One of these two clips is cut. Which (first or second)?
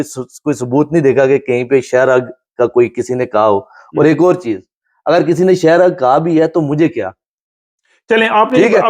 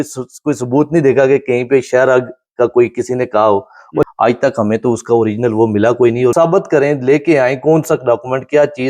second